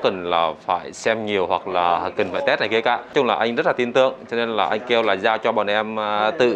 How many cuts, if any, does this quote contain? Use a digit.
1